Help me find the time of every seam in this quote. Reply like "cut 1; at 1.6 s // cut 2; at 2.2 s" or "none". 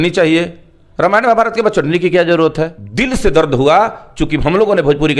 cut 1; at 2.8 s